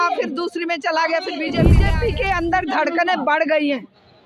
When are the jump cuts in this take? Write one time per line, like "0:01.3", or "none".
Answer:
0:01.7